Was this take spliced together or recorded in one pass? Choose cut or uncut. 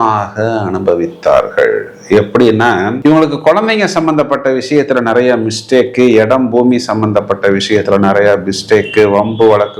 uncut